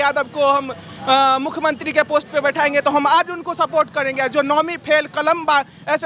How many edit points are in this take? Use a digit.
0